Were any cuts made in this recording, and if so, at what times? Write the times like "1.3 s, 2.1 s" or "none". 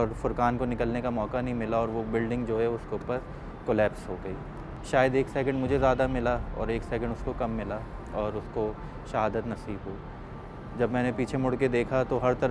4.6 s